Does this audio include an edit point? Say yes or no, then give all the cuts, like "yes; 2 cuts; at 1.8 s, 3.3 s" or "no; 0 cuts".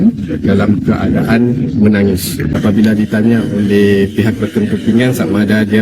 yes; 1 cut; at 2.4 s